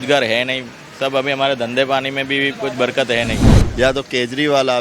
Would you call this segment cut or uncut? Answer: cut